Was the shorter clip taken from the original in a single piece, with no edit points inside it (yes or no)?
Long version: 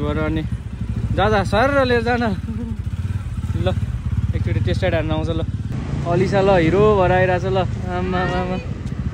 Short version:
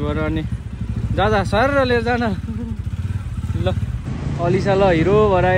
no